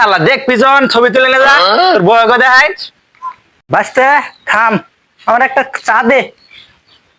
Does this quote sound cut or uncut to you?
uncut